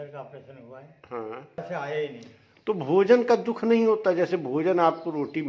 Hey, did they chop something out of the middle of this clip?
yes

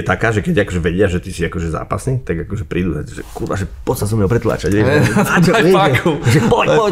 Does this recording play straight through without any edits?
yes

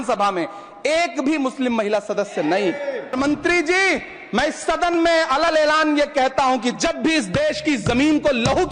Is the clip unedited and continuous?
no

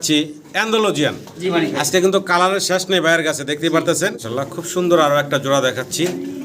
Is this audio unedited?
no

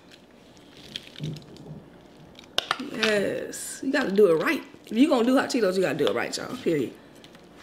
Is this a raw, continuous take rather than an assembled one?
yes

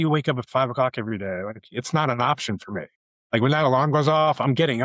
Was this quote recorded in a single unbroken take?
yes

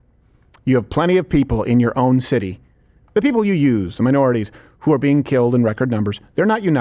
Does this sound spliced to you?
no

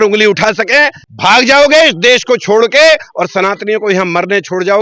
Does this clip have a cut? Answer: yes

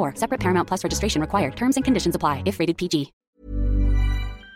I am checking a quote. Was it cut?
yes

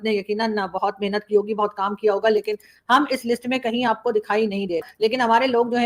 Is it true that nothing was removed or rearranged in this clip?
no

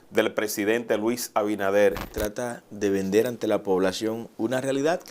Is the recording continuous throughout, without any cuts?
no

